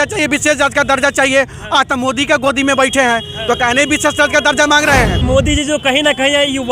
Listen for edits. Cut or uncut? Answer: cut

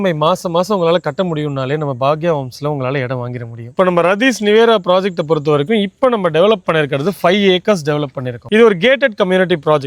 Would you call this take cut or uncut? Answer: cut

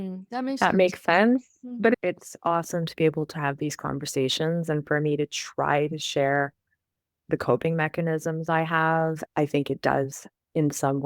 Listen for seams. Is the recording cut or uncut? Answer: cut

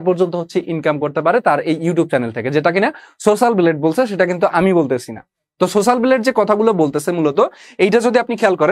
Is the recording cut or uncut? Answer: uncut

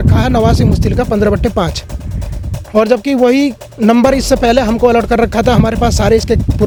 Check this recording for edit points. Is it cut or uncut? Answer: uncut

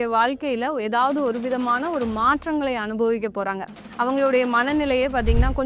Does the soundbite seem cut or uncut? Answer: uncut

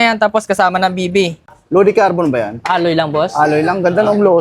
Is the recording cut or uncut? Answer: cut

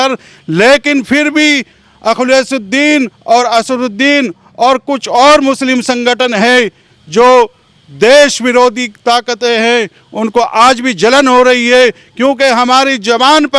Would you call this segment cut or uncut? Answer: uncut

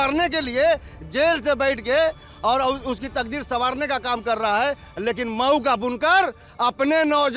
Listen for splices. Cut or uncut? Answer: uncut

